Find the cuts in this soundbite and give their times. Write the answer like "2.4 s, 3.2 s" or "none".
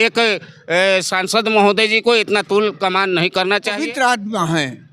3.8 s